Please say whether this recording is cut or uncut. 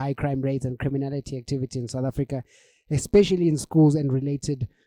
uncut